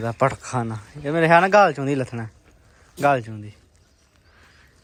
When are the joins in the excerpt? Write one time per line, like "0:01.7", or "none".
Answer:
none